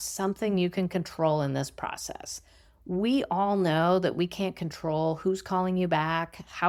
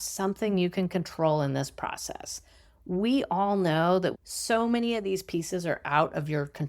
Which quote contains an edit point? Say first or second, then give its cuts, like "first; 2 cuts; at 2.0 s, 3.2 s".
second; 1 cut; at 4.1 s